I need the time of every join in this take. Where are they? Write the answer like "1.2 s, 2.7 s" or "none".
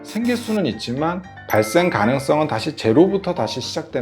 1.3 s